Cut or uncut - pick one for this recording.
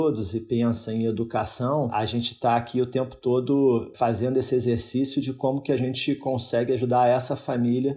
cut